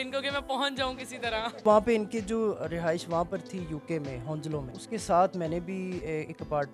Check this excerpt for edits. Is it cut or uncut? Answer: cut